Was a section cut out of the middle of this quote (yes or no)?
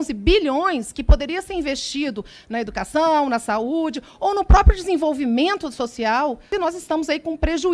yes